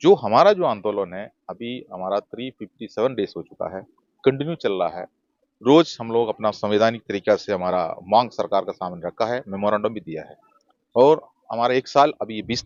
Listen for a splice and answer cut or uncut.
uncut